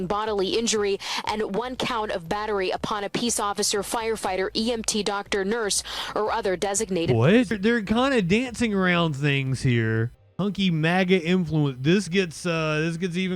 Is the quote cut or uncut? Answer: cut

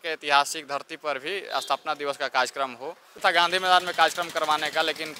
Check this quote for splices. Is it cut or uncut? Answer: cut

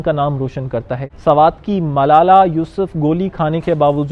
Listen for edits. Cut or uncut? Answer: cut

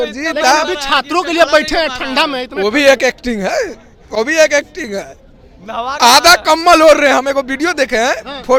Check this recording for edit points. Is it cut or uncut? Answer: uncut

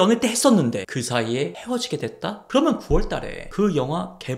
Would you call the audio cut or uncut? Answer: cut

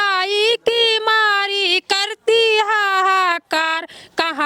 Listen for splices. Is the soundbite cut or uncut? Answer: uncut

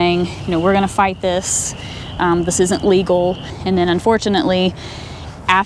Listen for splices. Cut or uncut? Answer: cut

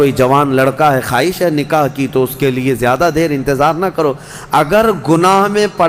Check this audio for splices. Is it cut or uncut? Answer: uncut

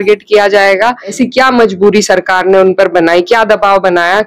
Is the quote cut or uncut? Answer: cut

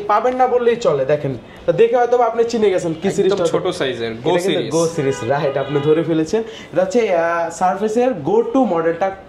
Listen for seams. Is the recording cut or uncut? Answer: uncut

